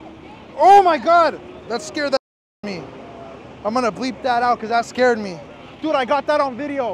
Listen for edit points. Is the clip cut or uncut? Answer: uncut